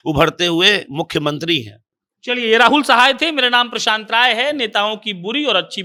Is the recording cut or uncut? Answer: uncut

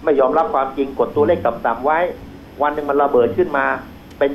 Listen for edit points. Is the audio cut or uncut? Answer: uncut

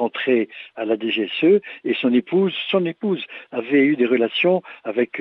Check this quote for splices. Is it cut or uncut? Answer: uncut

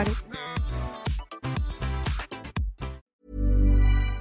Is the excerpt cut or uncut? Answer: cut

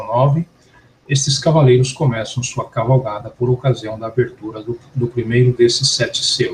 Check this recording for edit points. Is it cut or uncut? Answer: cut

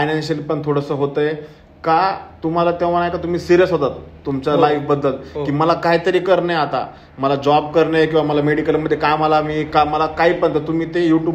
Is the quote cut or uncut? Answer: uncut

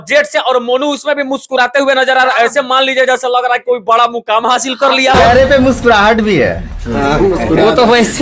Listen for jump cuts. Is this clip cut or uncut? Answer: cut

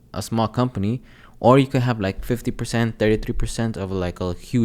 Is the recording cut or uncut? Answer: uncut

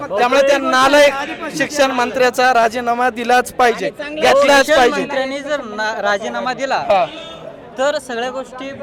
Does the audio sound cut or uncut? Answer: uncut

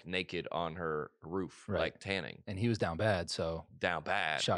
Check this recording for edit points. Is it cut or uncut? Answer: uncut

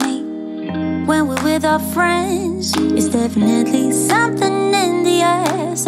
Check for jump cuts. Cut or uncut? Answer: uncut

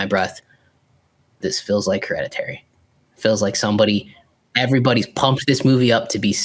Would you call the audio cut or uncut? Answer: uncut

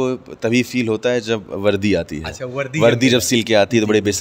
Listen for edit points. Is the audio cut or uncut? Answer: uncut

